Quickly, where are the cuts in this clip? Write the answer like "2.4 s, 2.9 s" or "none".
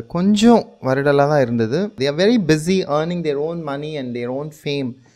1.9 s